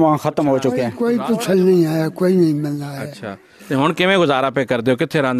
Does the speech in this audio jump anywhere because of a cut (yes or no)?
yes